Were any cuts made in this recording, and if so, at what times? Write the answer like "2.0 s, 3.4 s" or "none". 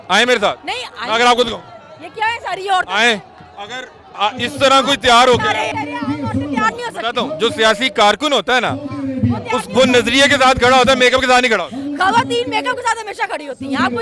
5.7 s